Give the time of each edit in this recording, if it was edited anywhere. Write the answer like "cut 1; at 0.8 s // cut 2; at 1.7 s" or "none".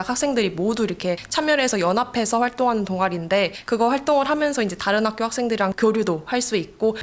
cut 1; at 5.7 s